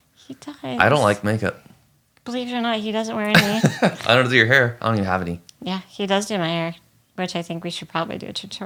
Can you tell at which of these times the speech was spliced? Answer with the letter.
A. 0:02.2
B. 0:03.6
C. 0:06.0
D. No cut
D